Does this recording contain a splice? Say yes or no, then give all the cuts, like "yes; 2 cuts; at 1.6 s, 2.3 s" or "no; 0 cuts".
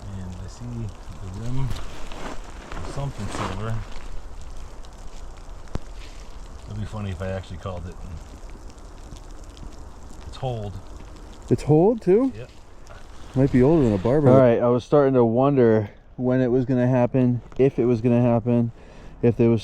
yes; 1 cut; at 14.2 s